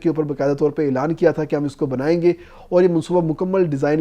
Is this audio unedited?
yes; 0 cuts

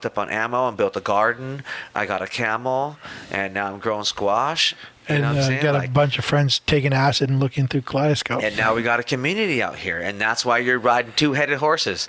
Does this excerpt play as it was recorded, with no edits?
yes; 0 cuts

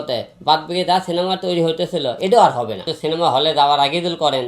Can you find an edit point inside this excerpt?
no; 0 cuts

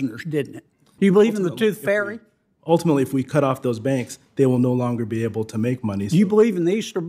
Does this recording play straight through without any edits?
no; 1 cut; at 0.9 s

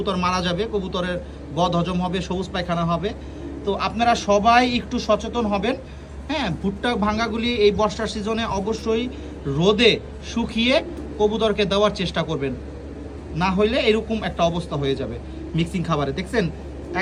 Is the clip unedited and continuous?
yes; 0 cuts

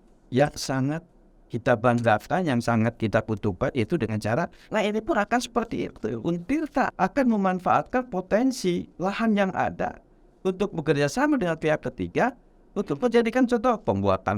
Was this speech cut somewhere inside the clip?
yes; 2 cuts; at 4.6 s, 6.9 s

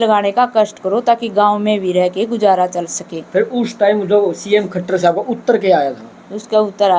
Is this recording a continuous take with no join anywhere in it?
yes; 0 cuts

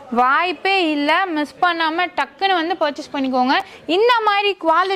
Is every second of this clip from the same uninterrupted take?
yes; 0 cuts

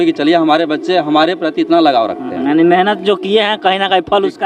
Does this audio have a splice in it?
no; 0 cuts

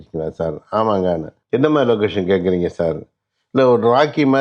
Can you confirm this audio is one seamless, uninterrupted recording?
no; 1 cut; at 1.3 s

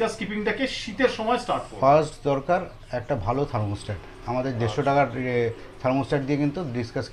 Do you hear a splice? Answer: no; 0 cuts

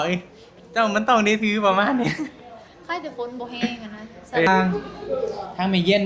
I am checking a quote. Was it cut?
yes; 1 cut; at 4.5 s

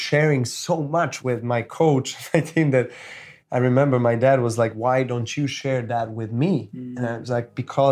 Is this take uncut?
yes; 0 cuts

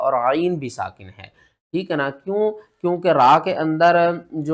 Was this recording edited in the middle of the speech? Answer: no; 0 cuts

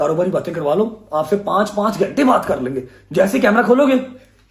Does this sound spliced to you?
no; 0 cuts

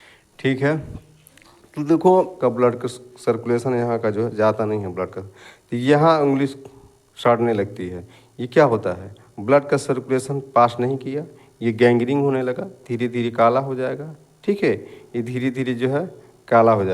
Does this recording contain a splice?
yes; 1 cut; at 2.3 s

